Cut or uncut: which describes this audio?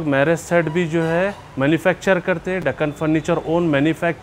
uncut